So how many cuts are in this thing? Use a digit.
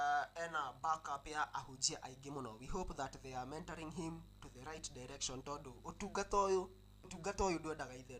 1